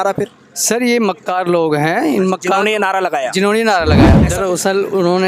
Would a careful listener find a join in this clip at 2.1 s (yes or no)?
no